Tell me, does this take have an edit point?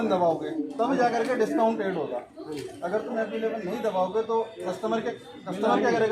no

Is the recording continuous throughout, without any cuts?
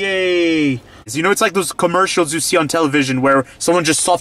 no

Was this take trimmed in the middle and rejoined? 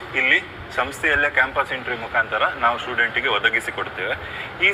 no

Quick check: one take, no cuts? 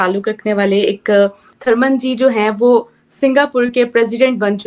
no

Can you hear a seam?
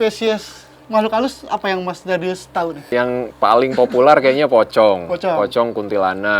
yes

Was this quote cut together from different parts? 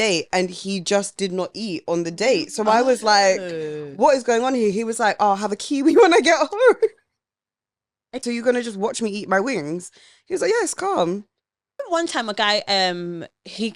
yes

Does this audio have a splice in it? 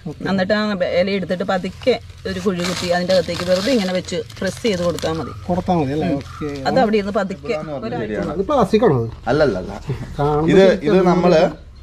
yes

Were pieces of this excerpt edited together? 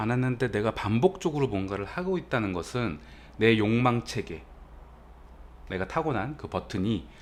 no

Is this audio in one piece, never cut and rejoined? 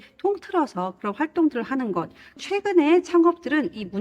no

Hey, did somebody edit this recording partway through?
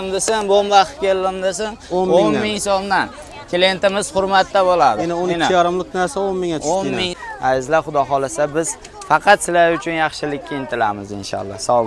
yes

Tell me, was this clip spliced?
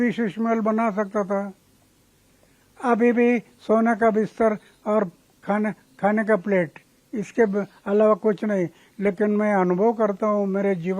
no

